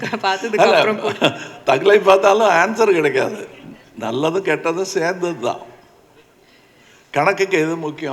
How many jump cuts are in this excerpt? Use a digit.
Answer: 0